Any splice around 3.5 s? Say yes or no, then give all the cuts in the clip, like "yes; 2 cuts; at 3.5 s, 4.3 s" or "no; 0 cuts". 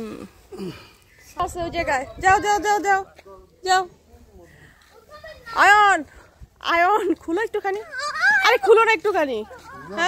no; 1 cut; at 1.2 s